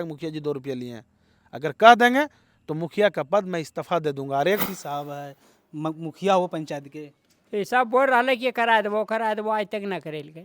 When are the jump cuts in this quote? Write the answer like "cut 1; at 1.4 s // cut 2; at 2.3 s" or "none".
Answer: cut 1; at 4.6 s

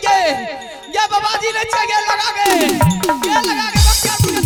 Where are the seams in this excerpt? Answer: none

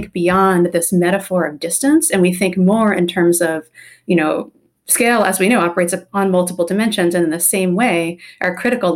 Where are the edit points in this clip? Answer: none

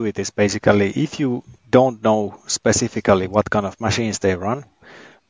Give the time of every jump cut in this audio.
cut 1; at 1.5 s

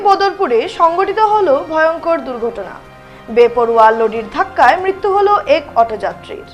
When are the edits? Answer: none

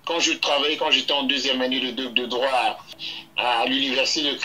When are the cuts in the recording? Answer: cut 1; at 3.0 s

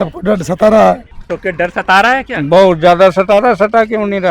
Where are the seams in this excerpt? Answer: cut 1; at 1.1 s

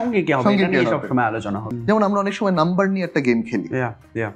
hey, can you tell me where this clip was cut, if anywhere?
cut 1; at 1.6 s

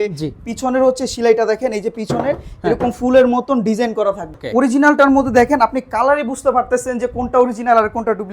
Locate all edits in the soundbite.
cut 1; at 4.3 s

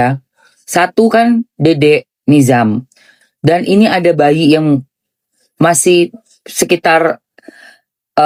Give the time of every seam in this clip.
none

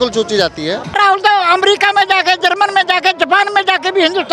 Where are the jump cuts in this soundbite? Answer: cut 1; at 0.9 s

